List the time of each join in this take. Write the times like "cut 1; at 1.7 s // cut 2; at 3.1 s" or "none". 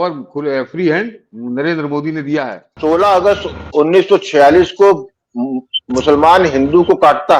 cut 1; at 2.6 s

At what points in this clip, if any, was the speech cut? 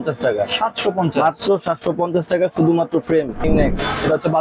cut 1; at 3.5 s

